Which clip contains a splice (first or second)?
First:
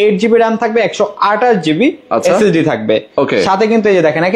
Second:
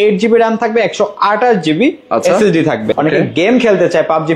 second